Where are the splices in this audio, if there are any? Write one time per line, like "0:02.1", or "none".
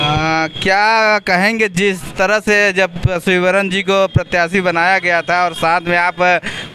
none